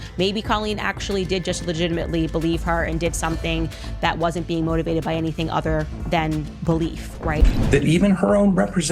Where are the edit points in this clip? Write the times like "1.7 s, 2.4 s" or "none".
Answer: 7.4 s